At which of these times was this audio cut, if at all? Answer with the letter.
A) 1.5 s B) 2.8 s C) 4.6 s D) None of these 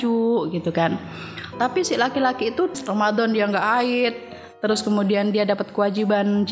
B